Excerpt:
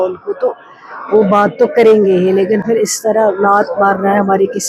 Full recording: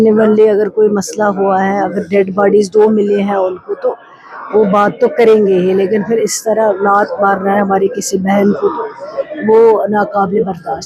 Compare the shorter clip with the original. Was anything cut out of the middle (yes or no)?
no